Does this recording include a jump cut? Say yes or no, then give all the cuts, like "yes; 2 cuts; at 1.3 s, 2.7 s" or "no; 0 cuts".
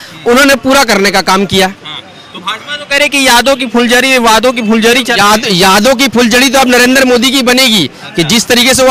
no; 0 cuts